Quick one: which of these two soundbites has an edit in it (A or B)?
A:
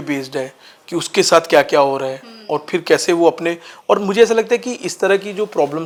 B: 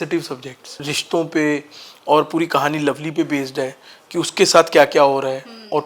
B